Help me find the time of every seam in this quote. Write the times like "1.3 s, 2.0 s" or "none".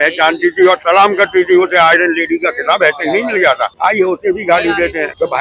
none